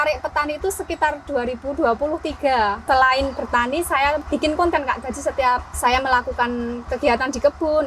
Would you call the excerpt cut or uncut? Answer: cut